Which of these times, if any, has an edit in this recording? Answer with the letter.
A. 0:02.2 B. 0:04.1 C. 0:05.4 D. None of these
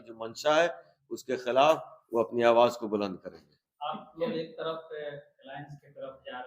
D